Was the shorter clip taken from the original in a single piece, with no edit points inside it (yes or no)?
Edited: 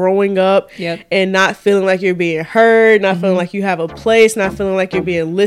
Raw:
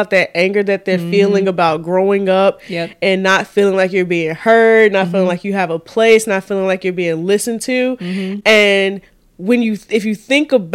yes